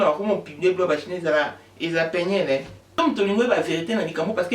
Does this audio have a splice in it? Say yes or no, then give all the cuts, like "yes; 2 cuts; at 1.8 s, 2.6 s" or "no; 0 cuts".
yes; 1 cut; at 3.0 s